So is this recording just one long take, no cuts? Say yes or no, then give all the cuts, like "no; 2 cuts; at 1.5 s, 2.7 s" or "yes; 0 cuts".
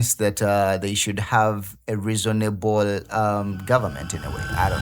yes; 0 cuts